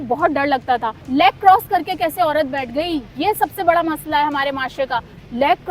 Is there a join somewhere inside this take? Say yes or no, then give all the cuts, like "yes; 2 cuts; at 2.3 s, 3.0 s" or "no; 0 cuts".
yes; 1 cut; at 1.0 s